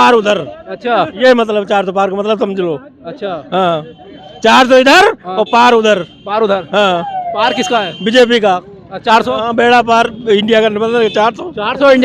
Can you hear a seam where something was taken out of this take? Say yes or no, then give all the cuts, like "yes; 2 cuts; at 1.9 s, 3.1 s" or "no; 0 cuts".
no; 0 cuts